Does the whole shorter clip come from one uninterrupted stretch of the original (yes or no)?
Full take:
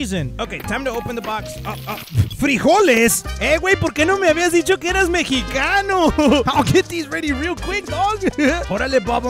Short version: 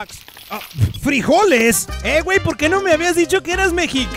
yes